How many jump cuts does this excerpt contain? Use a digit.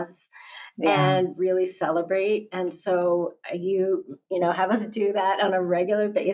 0